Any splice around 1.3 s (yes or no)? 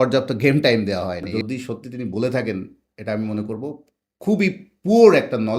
yes